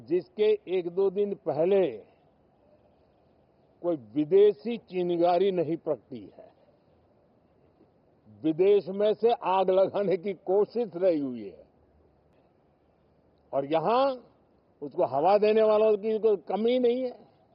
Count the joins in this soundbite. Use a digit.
1